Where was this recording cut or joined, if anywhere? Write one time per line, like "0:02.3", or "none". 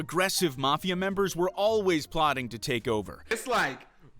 0:03.3